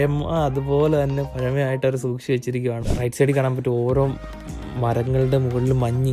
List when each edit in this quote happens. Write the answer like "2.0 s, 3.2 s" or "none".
2.9 s